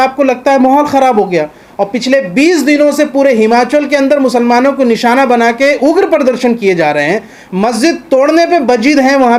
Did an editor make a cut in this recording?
no; 0 cuts

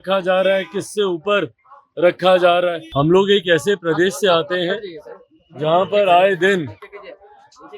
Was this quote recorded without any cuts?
no; 1 cut; at 2.8 s

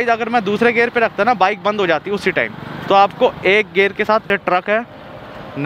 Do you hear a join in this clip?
yes; 1 cut; at 4.3 s

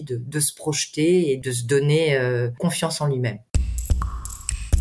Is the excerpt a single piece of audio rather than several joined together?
no; 3 cuts; at 1.4 s, 2.6 s, 3.4 s

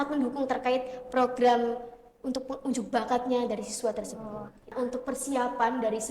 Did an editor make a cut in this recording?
yes; 1 cut; at 4.7 s

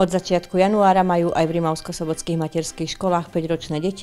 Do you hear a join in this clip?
no; 0 cuts

